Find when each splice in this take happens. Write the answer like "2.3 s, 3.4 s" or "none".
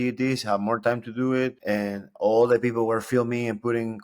1.6 s